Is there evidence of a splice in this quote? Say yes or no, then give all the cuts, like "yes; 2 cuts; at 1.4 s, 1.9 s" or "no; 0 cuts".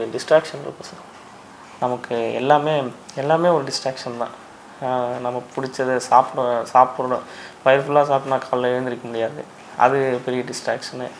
no; 0 cuts